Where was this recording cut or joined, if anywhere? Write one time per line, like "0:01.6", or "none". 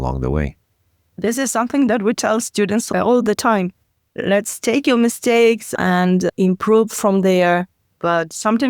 0:01.2
0:02.9
0:05.7